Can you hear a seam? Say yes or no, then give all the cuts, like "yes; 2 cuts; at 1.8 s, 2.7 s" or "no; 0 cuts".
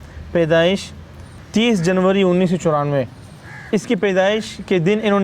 yes; 1 cut; at 1.3 s